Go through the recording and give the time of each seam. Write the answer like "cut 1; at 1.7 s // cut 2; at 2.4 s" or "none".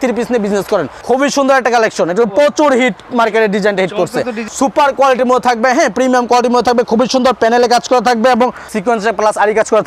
cut 1; at 1.0 s // cut 2; at 4.4 s // cut 3; at 8.7 s